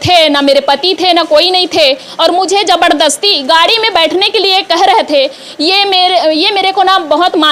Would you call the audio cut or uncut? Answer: uncut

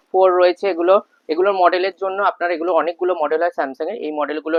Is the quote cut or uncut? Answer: uncut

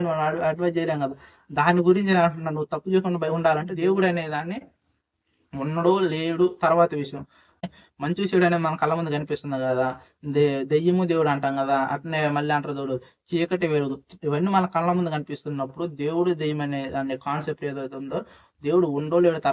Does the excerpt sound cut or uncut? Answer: cut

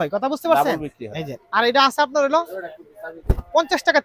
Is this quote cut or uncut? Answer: uncut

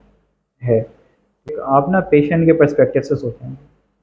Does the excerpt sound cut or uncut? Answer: cut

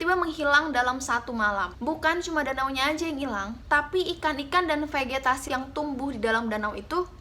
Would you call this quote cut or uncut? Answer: cut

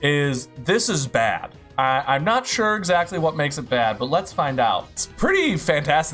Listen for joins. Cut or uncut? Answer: cut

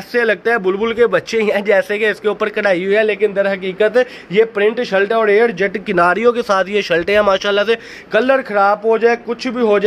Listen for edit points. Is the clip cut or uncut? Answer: uncut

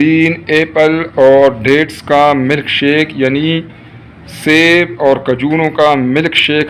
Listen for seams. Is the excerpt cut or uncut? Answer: uncut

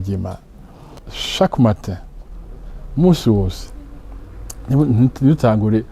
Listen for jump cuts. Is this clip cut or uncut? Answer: cut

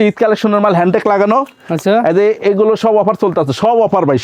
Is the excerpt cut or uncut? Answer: uncut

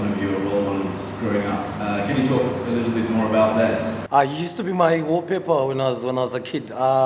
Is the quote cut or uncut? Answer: uncut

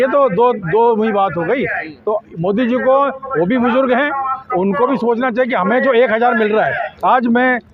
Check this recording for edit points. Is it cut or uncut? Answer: uncut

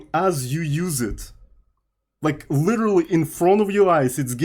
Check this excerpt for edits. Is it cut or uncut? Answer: uncut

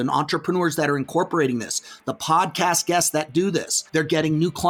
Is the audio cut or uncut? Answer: cut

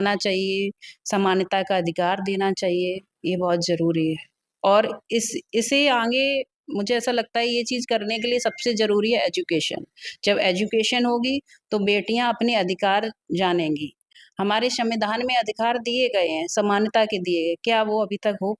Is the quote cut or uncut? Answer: uncut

